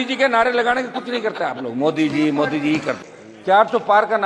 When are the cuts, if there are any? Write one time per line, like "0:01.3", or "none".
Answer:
0:03.0